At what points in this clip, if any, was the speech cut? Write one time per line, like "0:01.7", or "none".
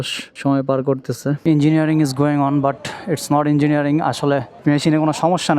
0:01.4
0:04.5